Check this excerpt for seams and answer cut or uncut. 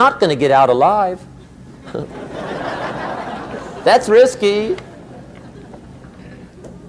uncut